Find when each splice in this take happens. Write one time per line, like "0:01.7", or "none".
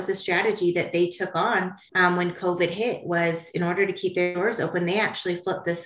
none